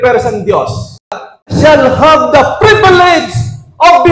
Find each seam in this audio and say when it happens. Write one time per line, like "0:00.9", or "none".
0:01.5